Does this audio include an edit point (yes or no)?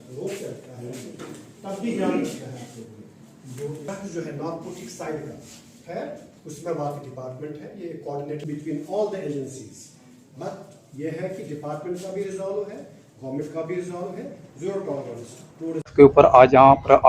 yes